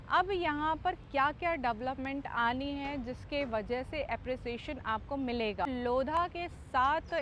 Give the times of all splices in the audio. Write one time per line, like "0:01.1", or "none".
0:05.7